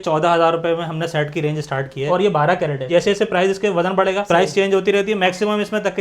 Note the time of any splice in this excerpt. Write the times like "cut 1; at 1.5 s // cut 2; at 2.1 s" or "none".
cut 1; at 2.1 s // cut 2; at 2.9 s